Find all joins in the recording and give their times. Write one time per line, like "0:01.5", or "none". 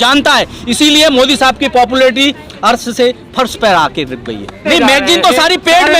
0:04.6